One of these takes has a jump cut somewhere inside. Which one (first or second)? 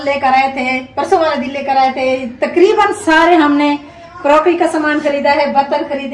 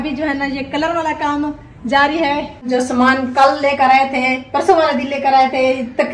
second